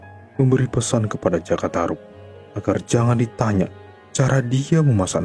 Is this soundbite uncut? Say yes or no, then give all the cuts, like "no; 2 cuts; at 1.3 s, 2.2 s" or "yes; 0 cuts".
yes; 0 cuts